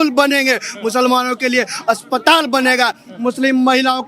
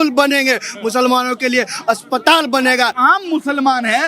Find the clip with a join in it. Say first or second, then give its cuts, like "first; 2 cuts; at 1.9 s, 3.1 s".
second; 1 cut; at 3.0 s